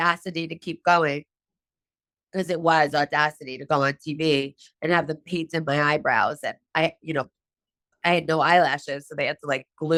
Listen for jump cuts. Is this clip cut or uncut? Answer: uncut